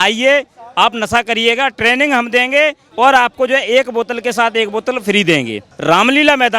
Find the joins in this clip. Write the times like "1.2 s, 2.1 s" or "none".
2.8 s, 5.7 s

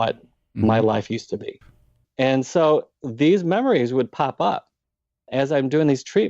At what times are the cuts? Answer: 2.1 s, 5.2 s

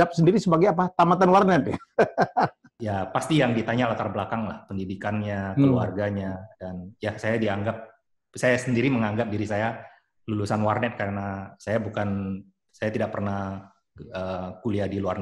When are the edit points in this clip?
2.7 s

